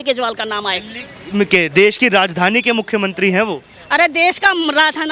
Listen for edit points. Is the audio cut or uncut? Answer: uncut